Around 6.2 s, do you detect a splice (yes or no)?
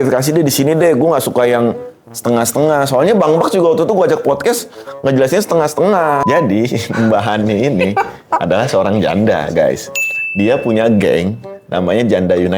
yes